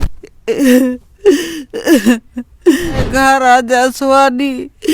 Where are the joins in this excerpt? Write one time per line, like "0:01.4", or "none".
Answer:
0:03.1